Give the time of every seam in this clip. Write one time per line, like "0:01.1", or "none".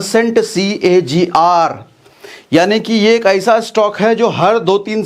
none